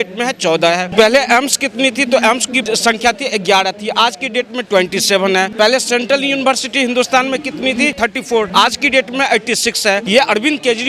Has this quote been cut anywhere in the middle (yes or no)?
yes